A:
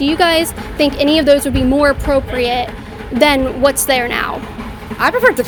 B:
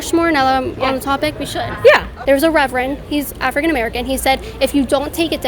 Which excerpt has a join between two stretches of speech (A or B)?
B